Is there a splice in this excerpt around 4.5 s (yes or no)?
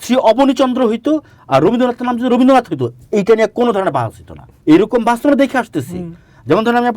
no